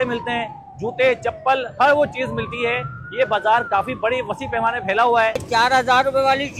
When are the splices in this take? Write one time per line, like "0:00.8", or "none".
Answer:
0:05.4